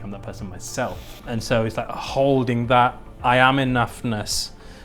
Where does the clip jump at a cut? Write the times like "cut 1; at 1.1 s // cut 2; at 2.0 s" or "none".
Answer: cut 1; at 1.2 s